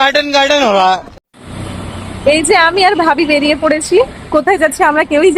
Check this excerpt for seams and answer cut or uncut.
cut